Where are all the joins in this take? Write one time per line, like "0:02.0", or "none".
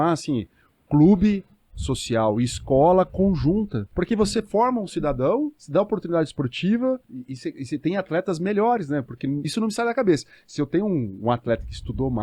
0:03.8
0:05.6
0:07.1
0:09.5